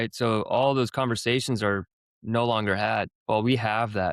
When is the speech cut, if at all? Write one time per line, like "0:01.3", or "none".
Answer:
0:03.2